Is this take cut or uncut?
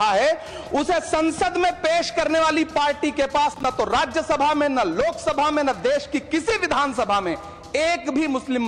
uncut